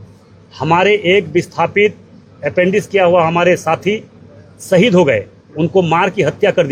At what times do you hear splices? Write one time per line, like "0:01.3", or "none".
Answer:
none